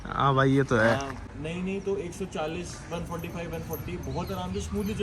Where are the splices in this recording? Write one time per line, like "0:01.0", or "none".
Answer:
0:01.2